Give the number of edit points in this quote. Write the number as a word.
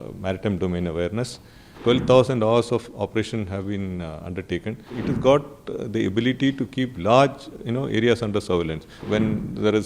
three